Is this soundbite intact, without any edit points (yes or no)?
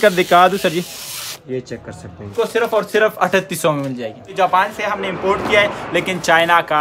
no